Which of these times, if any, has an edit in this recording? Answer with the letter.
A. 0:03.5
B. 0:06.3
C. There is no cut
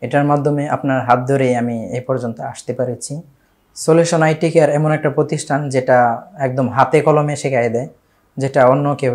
A